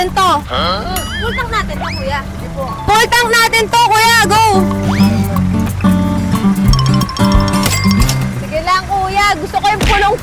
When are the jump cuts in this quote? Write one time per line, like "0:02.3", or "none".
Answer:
0:07.9